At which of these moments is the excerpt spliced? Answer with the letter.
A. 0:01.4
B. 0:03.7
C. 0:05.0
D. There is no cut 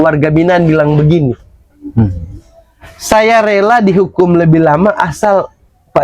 D